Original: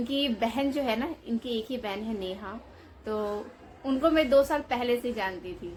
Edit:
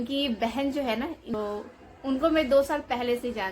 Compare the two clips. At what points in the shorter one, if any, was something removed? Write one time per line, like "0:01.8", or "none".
0:01.3